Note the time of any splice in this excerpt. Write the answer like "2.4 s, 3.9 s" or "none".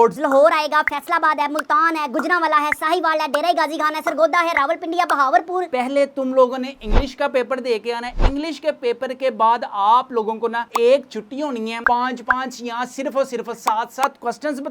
5.7 s, 11.8 s